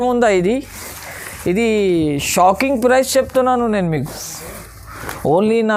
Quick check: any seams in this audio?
no; 0 cuts

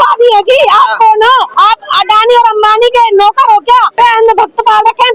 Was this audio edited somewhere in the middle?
yes; 2 cuts; at 1.5 s, 4.0 s

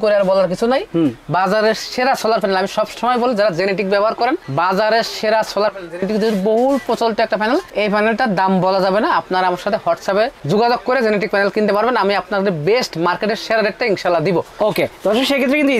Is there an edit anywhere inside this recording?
no; 0 cuts

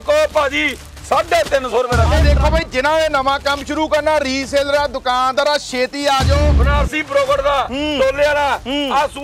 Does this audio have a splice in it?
yes; 2 cuts; at 2.2 s, 6.6 s

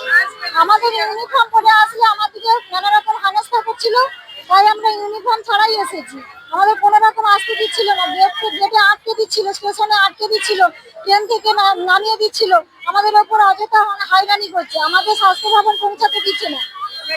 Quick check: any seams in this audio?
no; 0 cuts

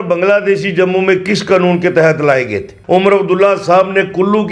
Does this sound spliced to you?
yes; 1 cut; at 2.7 s

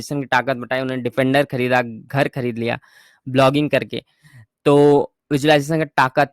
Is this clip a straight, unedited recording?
yes; 0 cuts

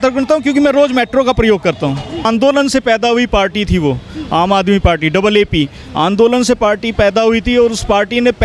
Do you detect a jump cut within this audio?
yes; 1 cut; at 2.2 s

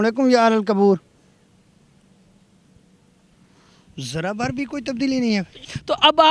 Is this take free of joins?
yes; 0 cuts

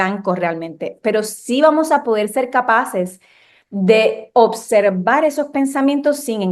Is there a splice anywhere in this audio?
no; 0 cuts

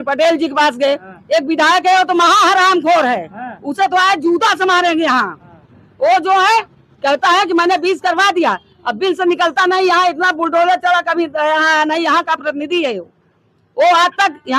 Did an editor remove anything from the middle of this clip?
no; 0 cuts

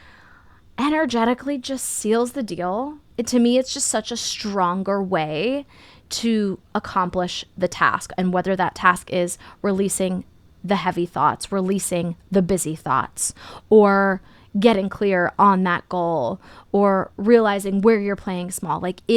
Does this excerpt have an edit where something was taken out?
no; 0 cuts

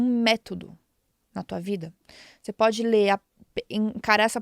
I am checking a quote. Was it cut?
no; 0 cuts

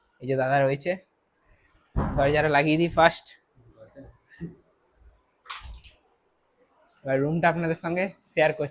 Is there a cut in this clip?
no; 0 cuts

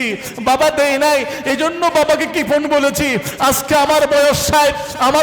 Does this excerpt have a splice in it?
no; 0 cuts

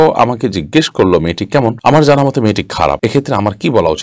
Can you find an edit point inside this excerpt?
yes; 2 cuts; at 1.8 s, 3.0 s

